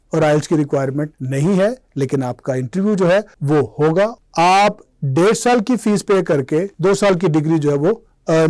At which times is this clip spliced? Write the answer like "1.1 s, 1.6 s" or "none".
1.2 s, 3.4 s, 4.1 s, 6.7 s